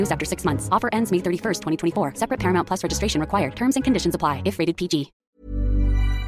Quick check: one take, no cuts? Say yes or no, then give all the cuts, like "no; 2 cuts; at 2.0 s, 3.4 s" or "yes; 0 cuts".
no; 1 cut; at 5.2 s